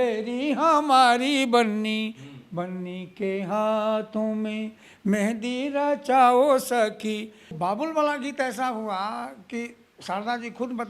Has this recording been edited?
yes; 1 cut; at 7.4 s

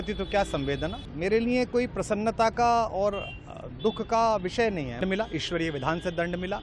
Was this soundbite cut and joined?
yes; 2 cuts; at 1.0 s, 5.0 s

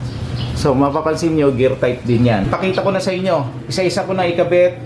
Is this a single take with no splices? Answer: no; 1 cut; at 2.4 s

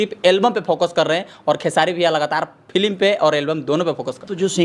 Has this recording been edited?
no; 0 cuts

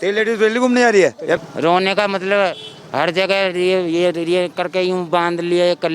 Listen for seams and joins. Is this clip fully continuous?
no; 1 cut; at 1.4 s

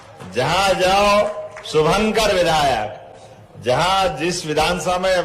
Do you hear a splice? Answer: no; 0 cuts

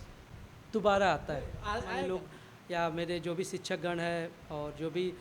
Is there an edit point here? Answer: yes; 1 cut; at 2.0 s

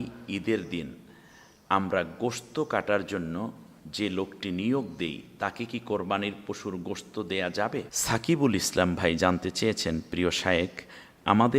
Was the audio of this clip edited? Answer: yes; 1 cut; at 7.9 s

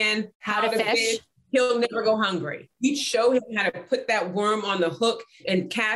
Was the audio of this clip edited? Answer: yes; 1 cut; at 2.6 s

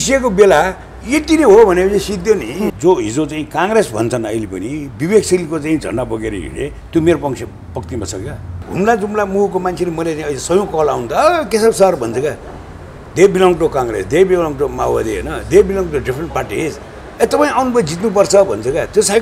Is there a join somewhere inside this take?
yes; 2 cuts; at 2.6 s, 8.6 s

